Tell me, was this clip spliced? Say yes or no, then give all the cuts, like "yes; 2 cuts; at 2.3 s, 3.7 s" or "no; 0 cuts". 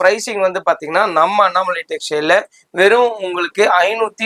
no; 0 cuts